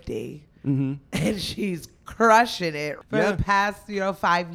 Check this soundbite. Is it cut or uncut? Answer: cut